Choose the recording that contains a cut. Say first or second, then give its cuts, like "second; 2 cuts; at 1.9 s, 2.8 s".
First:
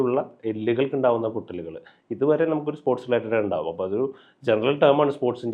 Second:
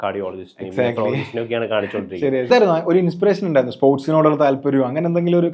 second; 1 cut; at 2.5 s